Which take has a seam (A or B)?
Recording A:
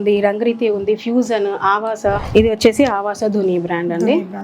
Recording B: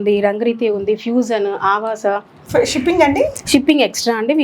A